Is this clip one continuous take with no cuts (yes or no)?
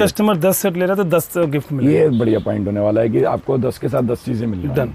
yes